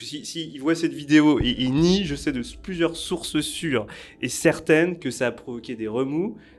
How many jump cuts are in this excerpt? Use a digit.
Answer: 0